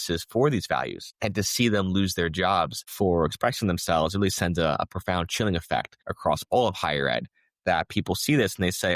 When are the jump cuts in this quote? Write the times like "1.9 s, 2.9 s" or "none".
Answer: 1.0 s, 2.8 s, 6.0 s